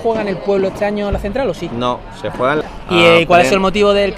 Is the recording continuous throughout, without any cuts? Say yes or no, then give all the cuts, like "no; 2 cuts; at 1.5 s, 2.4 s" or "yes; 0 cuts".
no; 1 cut; at 2.6 s